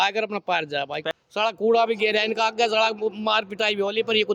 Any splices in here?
yes; 1 cut; at 1.0 s

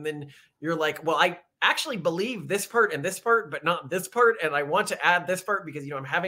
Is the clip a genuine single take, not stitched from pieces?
yes; 0 cuts

